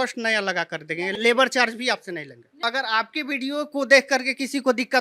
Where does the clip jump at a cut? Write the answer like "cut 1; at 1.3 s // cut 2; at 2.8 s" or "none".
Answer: cut 1; at 1.2 s // cut 2; at 2.6 s